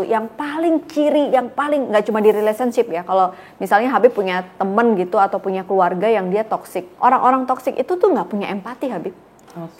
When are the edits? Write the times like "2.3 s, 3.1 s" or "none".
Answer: none

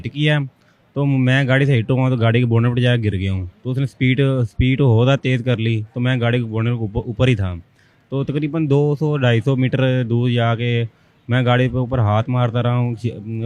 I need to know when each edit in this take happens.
none

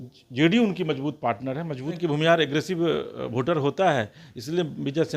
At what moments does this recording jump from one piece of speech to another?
2.0 s

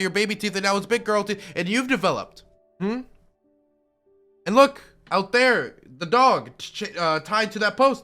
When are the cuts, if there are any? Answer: none

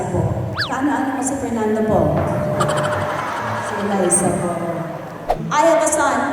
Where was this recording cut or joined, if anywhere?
5.2 s

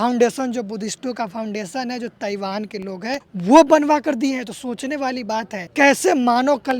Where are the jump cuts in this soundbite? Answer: 3.3 s, 5.6 s

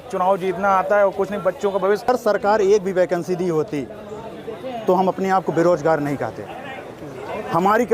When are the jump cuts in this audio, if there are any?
2.1 s

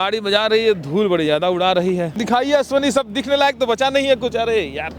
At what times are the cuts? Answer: 2.2 s

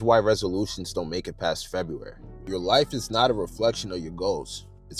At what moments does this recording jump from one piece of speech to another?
2.4 s

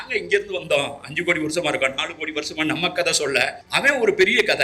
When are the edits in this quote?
3.6 s

